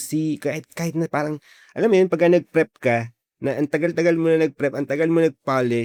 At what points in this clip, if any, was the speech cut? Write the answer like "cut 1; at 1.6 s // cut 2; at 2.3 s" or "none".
none